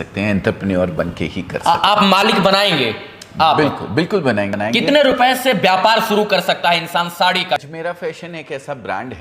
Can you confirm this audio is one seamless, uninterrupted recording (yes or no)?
no